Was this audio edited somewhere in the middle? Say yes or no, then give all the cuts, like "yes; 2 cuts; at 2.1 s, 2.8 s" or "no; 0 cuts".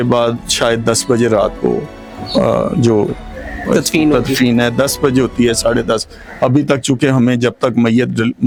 no; 0 cuts